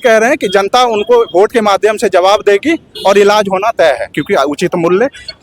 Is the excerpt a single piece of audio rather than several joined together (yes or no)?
no